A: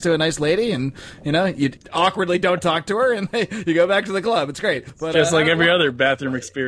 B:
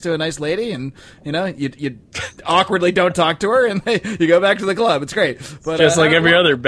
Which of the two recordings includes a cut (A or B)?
A